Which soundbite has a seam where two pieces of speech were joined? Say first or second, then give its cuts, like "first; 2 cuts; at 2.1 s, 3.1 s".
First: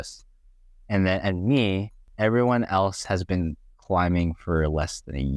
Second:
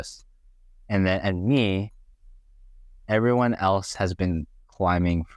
first; 1 cut; at 2.0 s